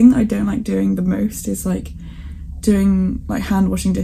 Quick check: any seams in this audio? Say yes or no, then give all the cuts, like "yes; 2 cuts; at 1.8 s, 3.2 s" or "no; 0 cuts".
no; 0 cuts